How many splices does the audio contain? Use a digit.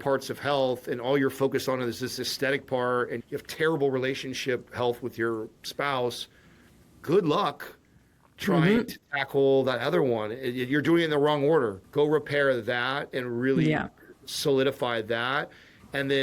2